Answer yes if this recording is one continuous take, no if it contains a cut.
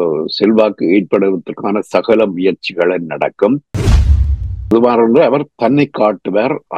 no